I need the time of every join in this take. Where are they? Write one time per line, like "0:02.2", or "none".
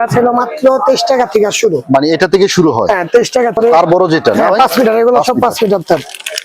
0:03.6